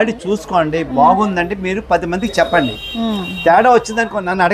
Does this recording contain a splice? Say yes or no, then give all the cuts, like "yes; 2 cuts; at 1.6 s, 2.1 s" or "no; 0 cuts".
no; 0 cuts